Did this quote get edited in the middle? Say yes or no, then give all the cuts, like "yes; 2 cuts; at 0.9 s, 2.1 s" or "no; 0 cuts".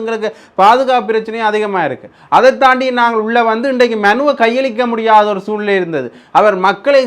no; 0 cuts